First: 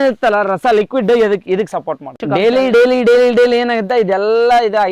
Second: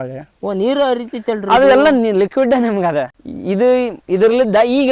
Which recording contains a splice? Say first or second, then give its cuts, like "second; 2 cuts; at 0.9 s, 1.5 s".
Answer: first; 1 cut; at 2.2 s